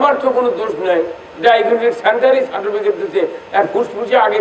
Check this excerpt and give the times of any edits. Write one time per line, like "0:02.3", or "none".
none